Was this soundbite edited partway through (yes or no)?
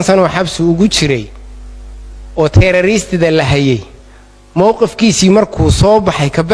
no